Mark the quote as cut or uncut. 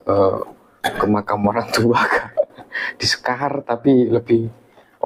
uncut